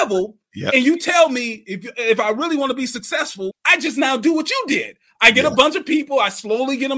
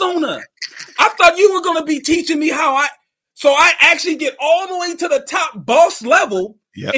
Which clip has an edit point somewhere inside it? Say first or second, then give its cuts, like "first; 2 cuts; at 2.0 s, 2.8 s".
first; 1 cut; at 3.6 s